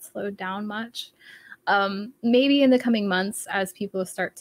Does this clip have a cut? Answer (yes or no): no